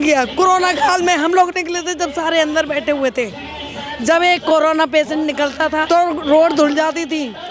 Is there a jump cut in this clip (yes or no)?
yes